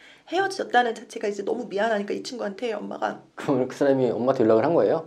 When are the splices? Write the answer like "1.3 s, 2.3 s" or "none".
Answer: 3.3 s